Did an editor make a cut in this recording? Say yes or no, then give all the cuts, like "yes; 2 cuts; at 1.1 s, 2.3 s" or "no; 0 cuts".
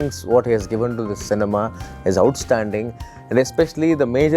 no; 0 cuts